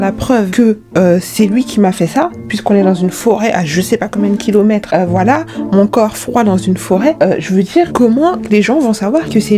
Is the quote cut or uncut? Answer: uncut